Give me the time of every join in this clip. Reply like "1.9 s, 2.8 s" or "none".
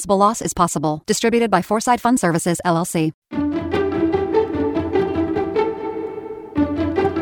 3.2 s